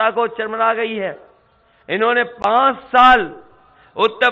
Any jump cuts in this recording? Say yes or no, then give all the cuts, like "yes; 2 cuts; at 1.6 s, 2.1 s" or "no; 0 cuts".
no; 0 cuts